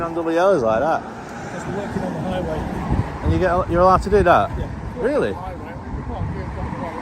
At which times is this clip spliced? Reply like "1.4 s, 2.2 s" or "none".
4.6 s

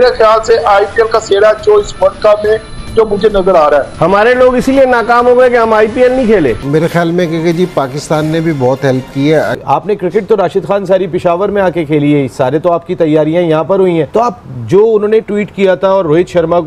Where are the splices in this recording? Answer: 3.9 s, 6.6 s, 9.6 s

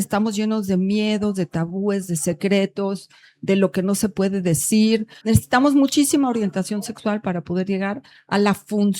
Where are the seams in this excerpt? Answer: 5.1 s

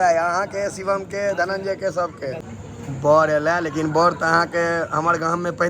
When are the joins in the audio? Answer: 2.5 s

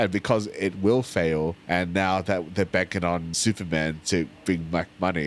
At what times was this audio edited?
1.6 s, 3.3 s

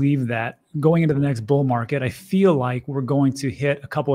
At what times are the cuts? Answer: none

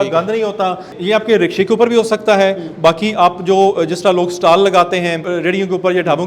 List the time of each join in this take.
0.9 s, 5.3 s

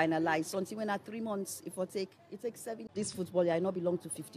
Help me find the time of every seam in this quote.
2.8 s

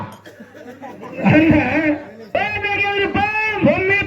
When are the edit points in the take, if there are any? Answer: 2.2 s

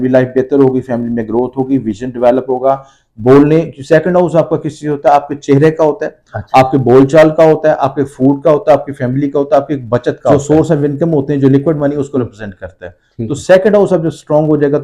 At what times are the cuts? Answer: 10.4 s

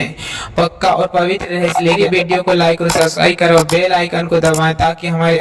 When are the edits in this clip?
2.0 s

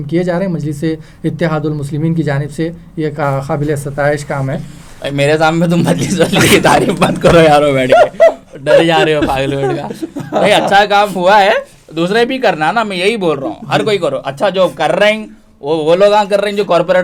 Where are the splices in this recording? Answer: none

